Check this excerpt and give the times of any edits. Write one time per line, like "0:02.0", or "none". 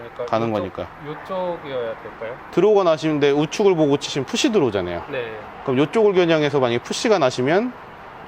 none